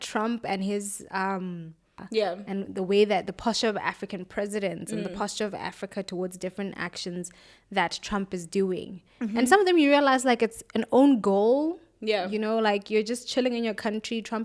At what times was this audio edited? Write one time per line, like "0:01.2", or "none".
0:01.9